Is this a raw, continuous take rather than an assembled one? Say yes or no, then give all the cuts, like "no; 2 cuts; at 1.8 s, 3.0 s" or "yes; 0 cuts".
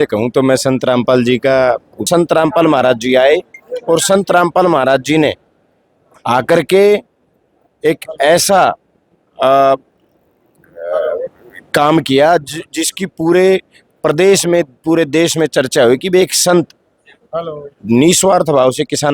no; 1 cut; at 2.1 s